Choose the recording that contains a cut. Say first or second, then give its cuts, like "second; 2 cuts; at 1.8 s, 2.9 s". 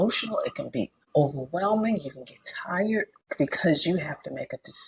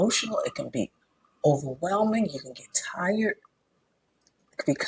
first; 2 cuts; at 1.0 s, 3.2 s